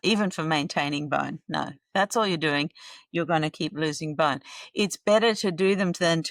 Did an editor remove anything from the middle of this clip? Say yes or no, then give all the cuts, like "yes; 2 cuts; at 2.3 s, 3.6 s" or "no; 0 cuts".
no; 0 cuts